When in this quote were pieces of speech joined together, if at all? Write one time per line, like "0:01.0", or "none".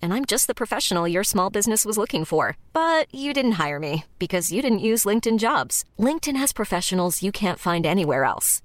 none